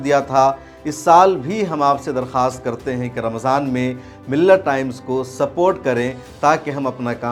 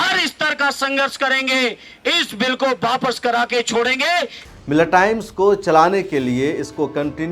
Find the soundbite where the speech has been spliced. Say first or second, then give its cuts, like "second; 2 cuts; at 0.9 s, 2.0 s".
second; 1 cut; at 4.4 s